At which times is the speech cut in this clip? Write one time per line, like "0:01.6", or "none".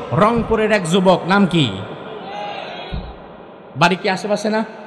none